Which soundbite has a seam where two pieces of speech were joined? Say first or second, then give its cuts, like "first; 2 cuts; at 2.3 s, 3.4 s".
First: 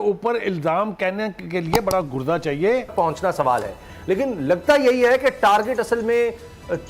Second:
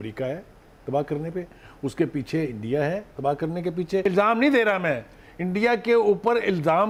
first; 1 cut; at 2.9 s